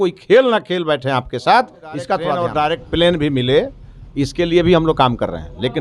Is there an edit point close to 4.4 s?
no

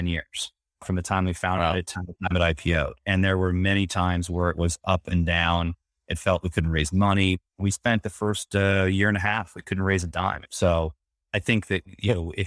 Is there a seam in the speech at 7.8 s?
no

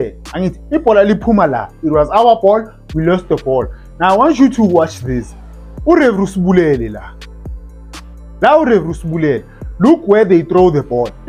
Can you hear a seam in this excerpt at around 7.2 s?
no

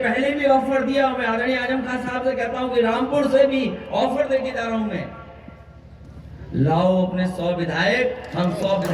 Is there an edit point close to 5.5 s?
no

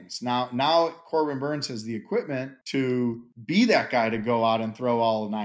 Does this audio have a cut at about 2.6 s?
yes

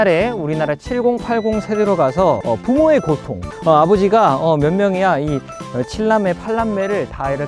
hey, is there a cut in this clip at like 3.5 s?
yes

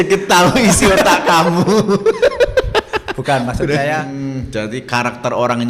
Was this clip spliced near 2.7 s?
no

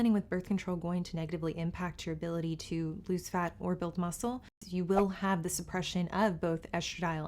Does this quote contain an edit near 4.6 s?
yes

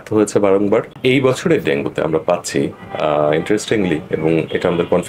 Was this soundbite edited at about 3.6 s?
no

